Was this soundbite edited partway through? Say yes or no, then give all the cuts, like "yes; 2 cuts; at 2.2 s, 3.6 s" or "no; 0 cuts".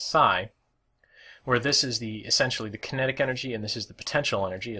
yes; 1 cut; at 3.0 s